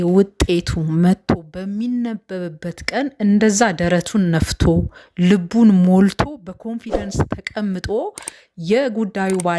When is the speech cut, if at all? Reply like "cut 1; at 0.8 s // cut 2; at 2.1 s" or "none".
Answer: none